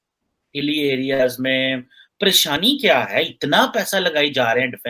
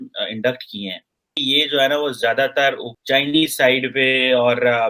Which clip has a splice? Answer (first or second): first